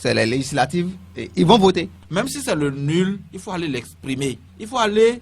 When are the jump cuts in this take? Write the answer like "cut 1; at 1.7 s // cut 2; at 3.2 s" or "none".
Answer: cut 1; at 2.0 s